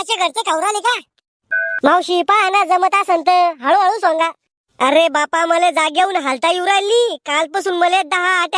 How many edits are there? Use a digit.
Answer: 1